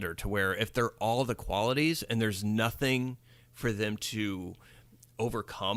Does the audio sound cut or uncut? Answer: uncut